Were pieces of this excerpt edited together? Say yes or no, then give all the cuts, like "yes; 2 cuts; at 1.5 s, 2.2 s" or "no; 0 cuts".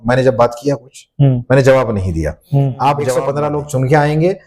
yes; 1 cut; at 3.3 s